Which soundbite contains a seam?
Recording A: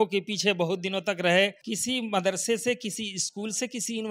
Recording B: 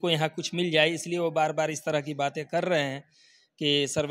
A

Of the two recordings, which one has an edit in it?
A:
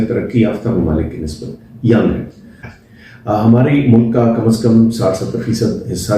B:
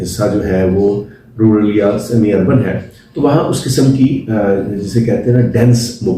A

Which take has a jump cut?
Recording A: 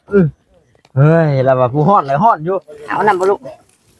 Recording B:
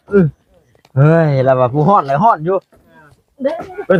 A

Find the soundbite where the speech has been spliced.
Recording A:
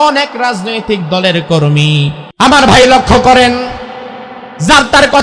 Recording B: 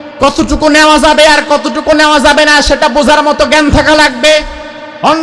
A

